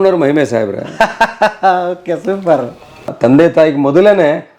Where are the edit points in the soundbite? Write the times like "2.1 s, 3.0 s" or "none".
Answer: 3.1 s